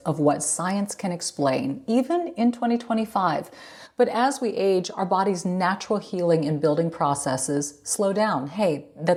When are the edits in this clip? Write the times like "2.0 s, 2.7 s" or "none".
none